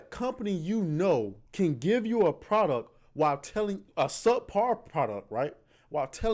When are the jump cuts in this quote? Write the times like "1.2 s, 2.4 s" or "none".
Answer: 1.4 s, 3.8 s